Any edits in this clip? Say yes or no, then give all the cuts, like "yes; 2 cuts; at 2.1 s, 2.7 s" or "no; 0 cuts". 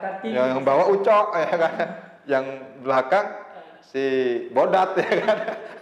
no; 0 cuts